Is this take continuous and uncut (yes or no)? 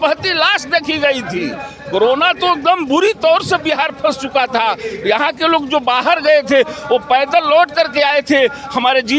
yes